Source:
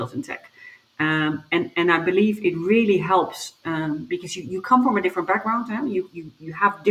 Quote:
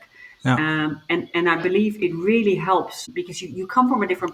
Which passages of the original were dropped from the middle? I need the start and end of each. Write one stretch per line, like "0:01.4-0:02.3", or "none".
0:03.5-0:04.0